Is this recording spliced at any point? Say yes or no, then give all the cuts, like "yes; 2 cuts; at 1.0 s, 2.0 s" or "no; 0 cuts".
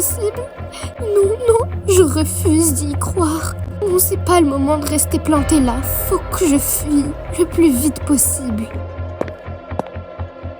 yes; 1 cut; at 0.9 s